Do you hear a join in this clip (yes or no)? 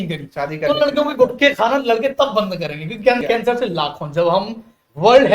yes